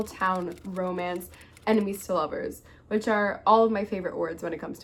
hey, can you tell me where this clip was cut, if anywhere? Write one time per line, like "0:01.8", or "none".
none